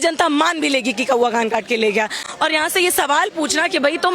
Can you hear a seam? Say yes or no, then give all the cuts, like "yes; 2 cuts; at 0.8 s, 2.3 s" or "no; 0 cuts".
yes; 1 cut; at 2.3 s